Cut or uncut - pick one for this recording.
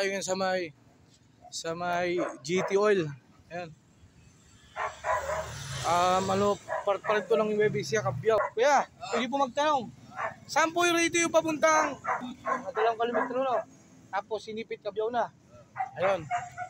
cut